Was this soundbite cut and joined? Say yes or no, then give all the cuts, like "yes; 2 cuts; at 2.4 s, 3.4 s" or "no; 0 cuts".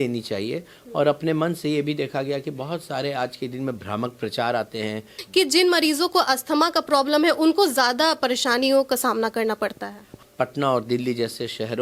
yes; 2 cuts; at 5.2 s, 10.1 s